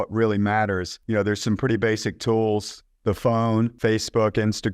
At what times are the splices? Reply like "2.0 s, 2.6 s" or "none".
0.9 s, 3.7 s